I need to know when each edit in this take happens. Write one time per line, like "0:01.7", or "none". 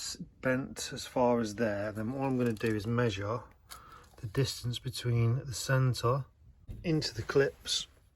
0:06.8